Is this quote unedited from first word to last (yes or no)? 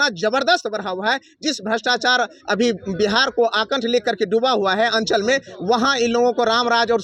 yes